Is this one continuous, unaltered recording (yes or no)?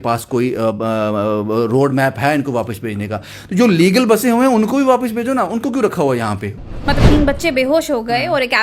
no